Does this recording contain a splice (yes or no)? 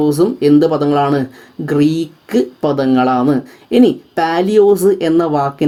no